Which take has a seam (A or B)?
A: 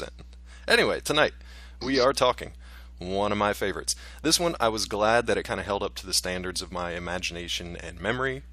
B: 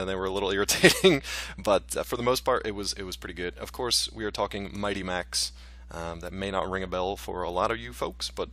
B